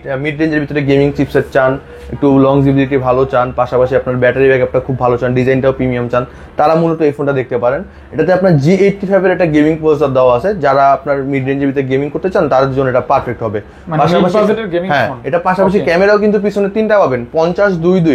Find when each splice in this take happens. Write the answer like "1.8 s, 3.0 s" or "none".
none